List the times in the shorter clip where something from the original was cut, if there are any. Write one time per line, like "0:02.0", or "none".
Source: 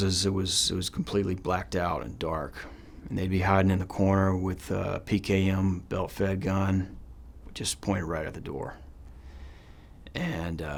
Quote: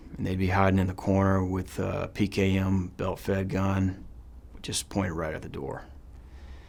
none